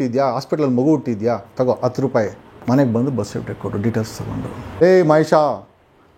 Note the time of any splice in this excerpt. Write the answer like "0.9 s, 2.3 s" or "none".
4.6 s